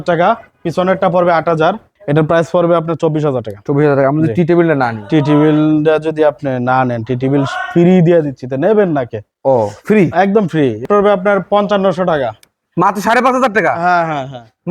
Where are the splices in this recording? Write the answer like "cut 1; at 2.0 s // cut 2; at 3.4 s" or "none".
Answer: cut 1; at 1.9 s // cut 2; at 10.8 s